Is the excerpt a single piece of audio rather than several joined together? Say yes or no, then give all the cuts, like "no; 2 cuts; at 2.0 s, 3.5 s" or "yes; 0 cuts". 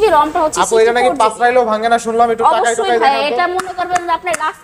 yes; 0 cuts